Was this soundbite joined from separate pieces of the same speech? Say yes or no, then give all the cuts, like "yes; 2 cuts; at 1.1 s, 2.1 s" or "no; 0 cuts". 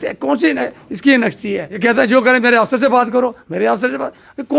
yes; 1 cut; at 1.8 s